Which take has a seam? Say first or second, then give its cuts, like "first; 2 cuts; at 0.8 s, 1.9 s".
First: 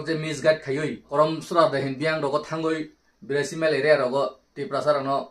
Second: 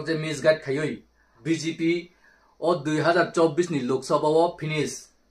second; 1 cut; at 1.0 s